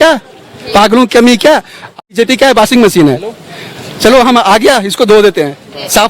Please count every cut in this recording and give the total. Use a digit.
1